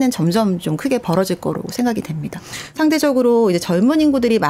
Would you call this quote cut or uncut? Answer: cut